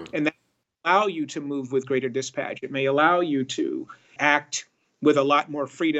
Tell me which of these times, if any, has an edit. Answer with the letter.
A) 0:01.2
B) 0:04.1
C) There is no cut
B